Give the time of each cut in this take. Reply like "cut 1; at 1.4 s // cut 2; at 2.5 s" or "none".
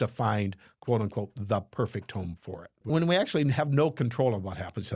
cut 1; at 2.8 s